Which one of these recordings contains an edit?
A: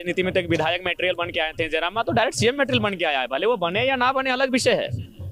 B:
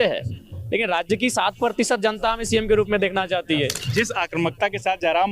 B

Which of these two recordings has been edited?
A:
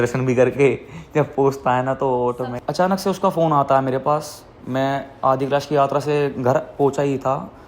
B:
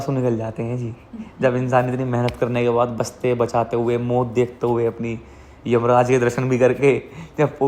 A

